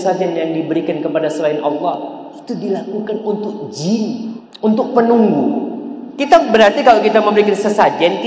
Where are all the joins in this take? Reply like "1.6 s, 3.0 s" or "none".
4.4 s